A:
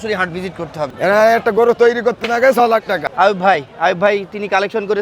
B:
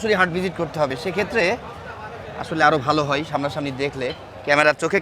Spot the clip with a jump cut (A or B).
A